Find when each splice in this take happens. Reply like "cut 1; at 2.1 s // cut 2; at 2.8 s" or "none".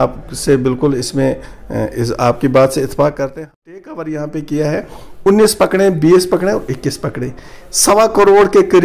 cut 1; at 3.4 s